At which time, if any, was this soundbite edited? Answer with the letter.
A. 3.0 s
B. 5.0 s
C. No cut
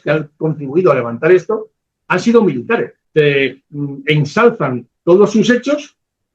A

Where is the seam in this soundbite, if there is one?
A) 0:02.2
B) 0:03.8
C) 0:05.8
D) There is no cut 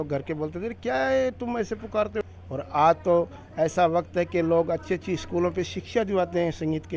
A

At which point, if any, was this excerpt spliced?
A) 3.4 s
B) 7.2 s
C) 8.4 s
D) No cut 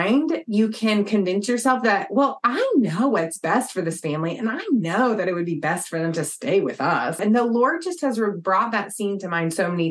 B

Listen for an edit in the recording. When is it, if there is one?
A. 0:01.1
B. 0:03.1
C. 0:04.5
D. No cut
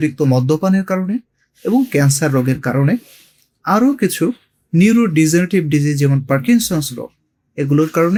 D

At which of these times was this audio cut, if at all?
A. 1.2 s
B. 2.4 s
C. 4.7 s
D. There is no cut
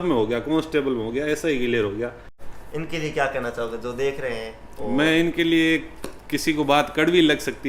B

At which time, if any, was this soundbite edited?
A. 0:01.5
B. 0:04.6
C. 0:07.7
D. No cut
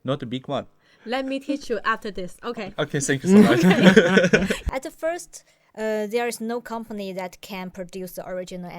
B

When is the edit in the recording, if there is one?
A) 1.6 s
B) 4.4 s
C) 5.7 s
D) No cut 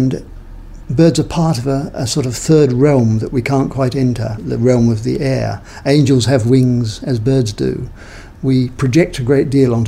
B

